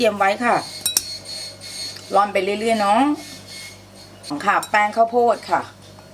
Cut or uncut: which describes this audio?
cut